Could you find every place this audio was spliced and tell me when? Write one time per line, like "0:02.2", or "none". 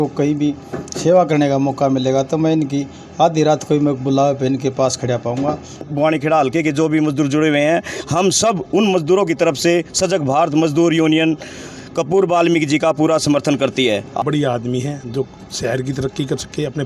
0:05.9
0:14.2